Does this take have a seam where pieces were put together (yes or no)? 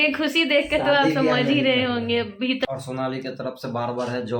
yes